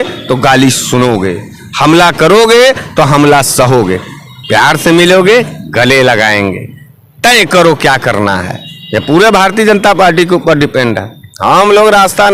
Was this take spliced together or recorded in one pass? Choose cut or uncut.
uncut